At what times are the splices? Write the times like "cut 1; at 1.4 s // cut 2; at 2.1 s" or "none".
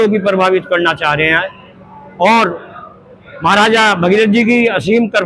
none